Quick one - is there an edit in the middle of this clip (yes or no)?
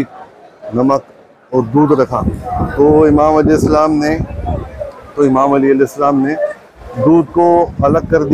no